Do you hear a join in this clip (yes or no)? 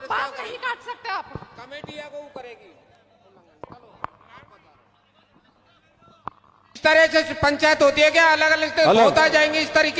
yes